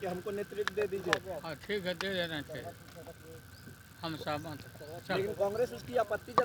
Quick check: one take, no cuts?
yes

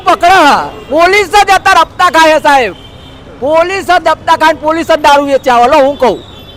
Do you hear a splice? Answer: no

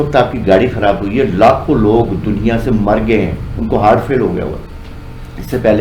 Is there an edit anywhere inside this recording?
no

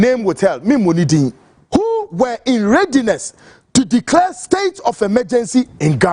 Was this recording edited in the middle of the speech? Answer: yes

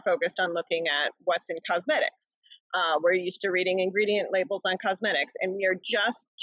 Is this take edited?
no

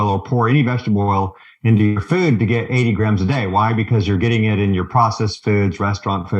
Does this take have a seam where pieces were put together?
no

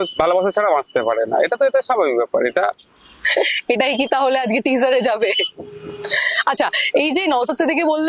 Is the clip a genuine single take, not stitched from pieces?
yes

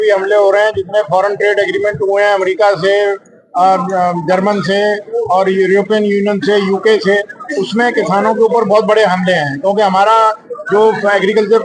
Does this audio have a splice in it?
no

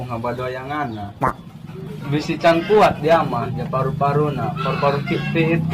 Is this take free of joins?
yes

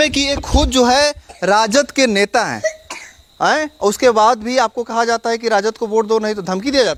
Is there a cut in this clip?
no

